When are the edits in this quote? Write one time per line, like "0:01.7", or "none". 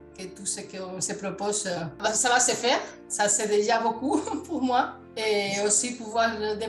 0:02.0
0:03.0